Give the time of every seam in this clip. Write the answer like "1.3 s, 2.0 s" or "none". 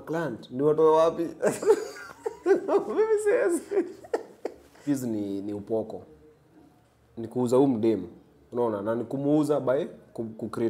4.8 s